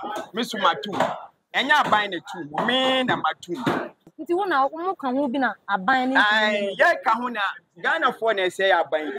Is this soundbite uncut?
no; 1 cut; at 4.1 s

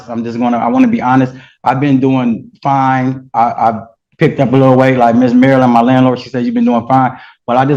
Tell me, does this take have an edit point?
no; 0 cuts

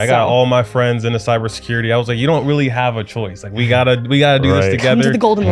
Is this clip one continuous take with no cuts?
yes; 0 cuts

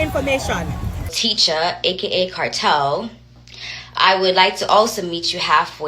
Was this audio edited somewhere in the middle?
yes; 1 cut; at 1.2 s

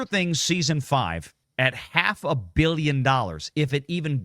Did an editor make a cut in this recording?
yes; 1 cut; at 1.4 s

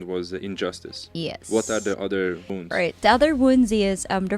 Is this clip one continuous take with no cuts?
no; 1 cut; at 2.5 s

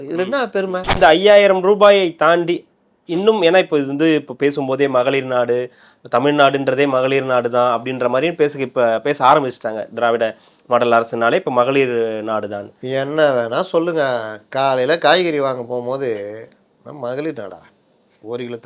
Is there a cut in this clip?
yes; 1 cut; at 0.9 s

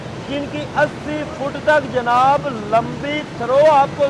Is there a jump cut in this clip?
no; 0 cuts

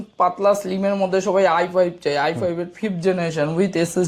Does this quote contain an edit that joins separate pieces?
no; 0 cuts

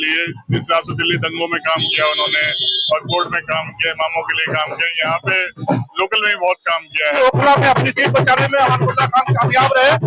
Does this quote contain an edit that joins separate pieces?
yes; 1 cut; at 7.2 s

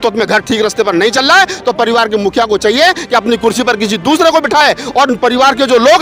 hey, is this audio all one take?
yes; 0 cuts

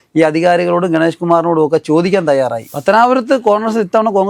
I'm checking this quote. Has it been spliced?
yes; 1 cut; at 2.6 s

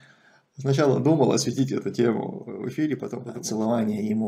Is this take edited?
yes; 1 cut; at 3.1 s

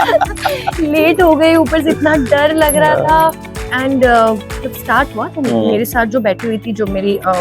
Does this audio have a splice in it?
no; 0 cuts

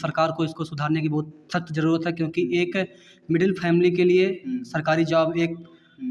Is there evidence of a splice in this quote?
no; 0 cuts

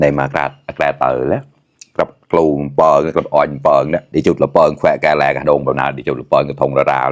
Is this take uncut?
no; 1 cut; at 4.0 s

